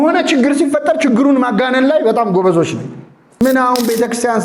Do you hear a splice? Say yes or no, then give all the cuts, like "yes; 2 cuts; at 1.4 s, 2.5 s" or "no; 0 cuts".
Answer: yes; 1 cut; at 3.4 s